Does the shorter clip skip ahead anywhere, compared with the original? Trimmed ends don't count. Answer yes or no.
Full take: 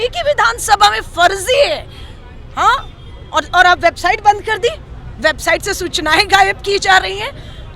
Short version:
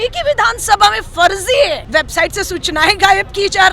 yes